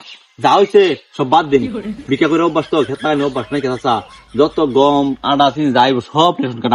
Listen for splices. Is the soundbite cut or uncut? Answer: uncut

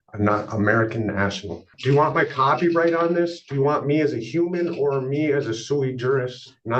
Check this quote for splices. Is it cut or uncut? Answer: cut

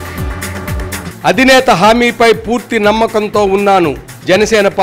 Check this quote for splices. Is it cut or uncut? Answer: uncut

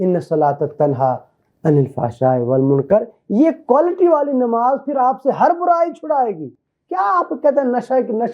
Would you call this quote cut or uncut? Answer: uncut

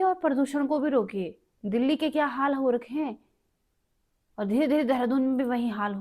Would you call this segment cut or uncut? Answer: uncut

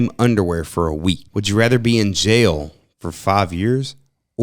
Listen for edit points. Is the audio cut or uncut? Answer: cut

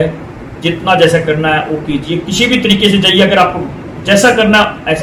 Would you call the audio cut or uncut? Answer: uncut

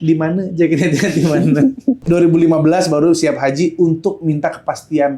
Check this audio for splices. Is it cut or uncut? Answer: cut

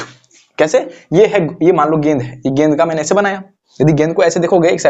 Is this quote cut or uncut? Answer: uncut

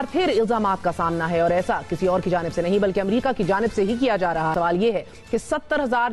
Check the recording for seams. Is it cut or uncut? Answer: cut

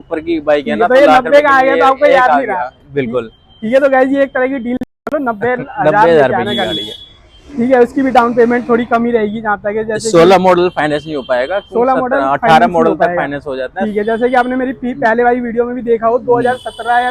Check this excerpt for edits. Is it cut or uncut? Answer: uncut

